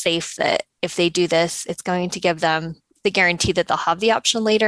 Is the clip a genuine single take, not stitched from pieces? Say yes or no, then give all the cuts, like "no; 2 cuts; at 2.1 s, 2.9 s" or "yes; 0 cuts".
yes; 0 cuts